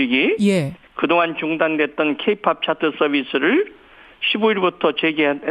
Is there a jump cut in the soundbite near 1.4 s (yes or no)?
yes